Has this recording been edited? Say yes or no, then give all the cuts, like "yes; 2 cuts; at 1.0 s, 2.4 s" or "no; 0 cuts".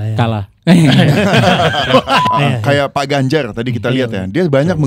yes; 1 cut; at 2.2 s